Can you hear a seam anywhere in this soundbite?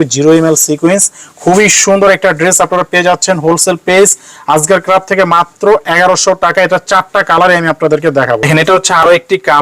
no; 0 cuts

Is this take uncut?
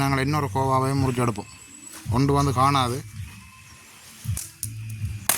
no; 1 cut; at 4.4 s

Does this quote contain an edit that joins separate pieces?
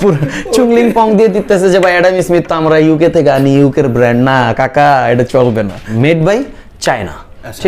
yes; 1 cut; at 5.8 s

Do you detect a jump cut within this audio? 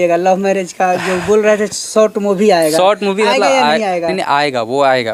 no; 0 cuts

